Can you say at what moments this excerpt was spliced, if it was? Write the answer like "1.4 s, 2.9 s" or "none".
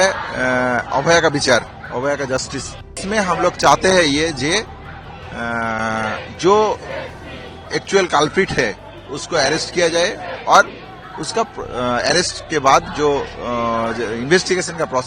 3.0 s